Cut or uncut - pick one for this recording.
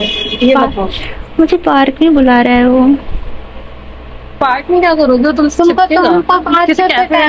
uncut